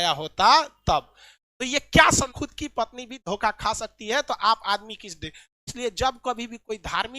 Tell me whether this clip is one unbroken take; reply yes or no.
no